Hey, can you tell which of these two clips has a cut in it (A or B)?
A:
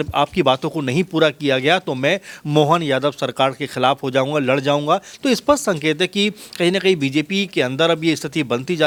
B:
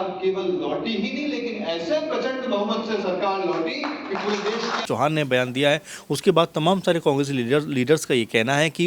B